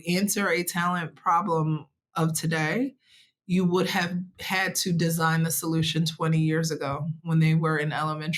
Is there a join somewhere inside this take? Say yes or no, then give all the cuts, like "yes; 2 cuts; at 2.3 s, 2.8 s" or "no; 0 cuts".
no; 0 cuts